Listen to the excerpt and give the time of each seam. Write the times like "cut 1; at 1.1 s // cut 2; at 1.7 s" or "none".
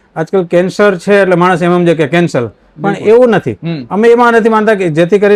none